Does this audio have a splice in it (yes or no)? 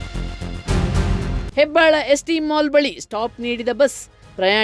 yes